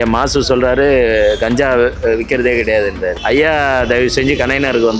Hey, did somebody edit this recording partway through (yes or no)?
no